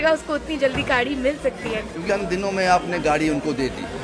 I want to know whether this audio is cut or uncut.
cut